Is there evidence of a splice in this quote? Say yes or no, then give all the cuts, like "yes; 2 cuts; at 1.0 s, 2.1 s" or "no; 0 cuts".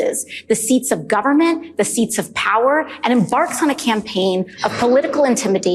no; 0 cuts